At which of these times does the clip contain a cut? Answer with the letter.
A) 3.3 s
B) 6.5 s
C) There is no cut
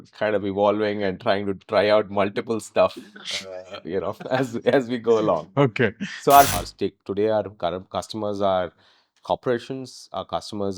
B